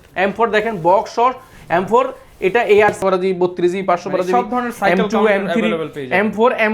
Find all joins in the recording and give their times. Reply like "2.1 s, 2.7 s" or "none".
3.0 s